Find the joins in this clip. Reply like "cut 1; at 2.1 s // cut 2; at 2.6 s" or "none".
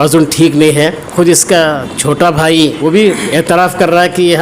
cut 1; at 1.0 s // cut 2; at 2.8 s